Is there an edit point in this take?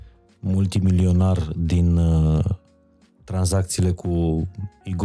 no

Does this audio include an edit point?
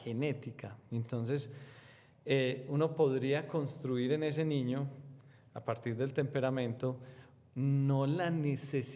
no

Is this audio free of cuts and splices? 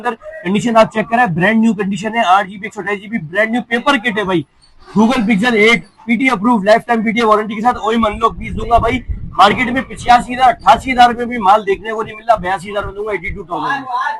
yes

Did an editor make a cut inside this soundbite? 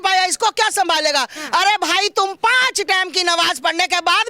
yes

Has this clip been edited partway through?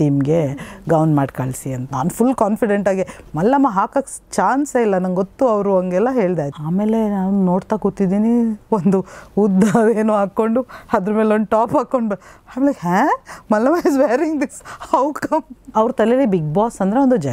yes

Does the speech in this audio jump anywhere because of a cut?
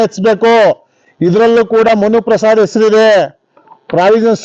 no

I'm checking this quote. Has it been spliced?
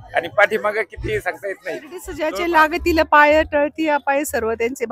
yes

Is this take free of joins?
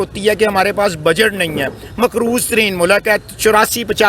yes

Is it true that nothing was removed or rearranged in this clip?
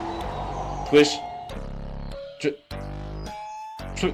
yes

